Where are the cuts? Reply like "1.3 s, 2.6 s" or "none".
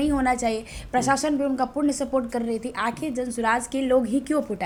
none